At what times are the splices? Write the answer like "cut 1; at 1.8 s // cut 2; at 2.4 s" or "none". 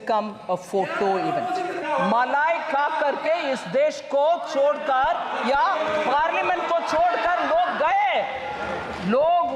cut 1; at 1.8 s